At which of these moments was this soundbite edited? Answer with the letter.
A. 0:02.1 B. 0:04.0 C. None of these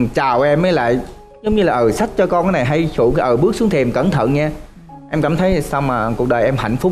C